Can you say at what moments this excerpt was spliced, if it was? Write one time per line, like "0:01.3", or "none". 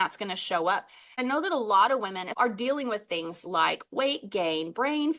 0:01.2
0:02.2